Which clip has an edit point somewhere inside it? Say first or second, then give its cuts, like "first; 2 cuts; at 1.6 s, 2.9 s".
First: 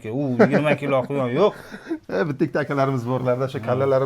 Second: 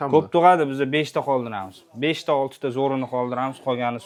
first; 1 cut; at 2.0 s